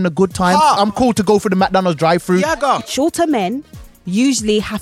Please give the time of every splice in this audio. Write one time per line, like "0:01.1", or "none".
0:00.8
0:02.8